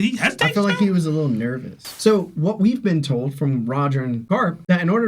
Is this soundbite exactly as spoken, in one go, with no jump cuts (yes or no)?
no